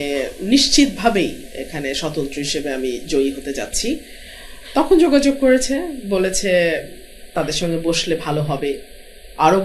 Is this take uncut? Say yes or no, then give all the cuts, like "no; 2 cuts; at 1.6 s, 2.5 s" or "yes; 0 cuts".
yes; 0 cuts